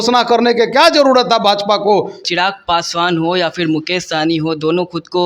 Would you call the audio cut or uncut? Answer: cut